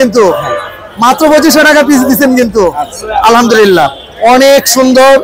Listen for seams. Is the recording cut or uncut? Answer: uncut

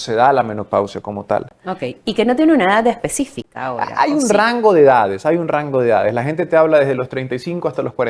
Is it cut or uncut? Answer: uncut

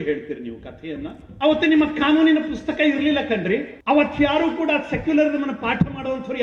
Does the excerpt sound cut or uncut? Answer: cut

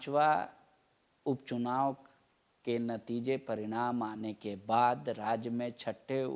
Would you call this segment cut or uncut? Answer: uncut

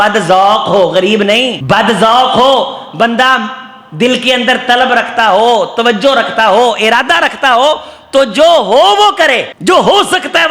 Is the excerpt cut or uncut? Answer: cut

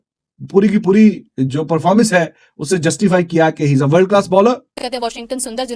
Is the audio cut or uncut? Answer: cut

